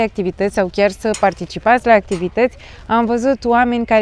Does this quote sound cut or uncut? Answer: uncut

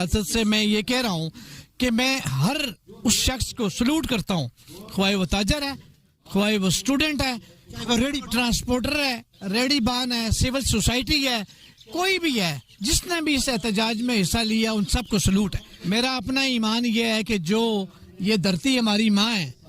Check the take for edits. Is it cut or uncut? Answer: cut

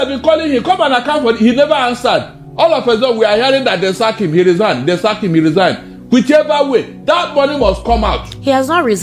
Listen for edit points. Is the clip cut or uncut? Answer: uncut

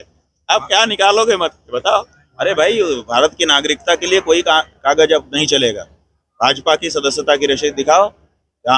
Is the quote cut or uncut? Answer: cut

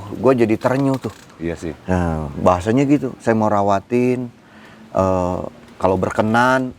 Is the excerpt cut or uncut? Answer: uncut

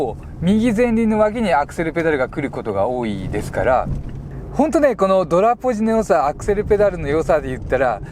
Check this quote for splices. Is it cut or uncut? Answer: cut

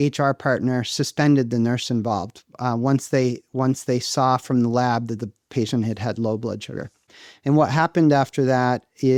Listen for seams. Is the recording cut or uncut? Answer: uncut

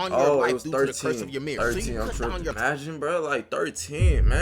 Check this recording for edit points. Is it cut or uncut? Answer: cut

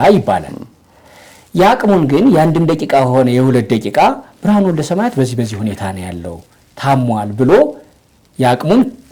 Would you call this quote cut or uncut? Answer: uncut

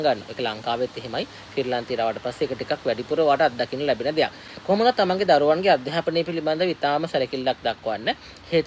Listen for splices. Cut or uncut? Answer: uncut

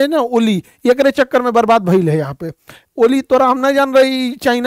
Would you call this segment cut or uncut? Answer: uncut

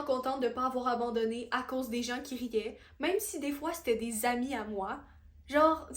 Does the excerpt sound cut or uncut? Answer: uncut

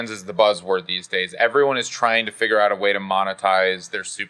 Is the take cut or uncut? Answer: uncut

